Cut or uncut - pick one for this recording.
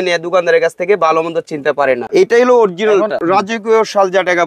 cut